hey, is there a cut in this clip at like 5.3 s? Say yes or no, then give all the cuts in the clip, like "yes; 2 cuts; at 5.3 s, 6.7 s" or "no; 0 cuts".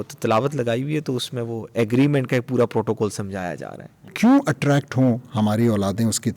no; 1 cut; at 4.1 s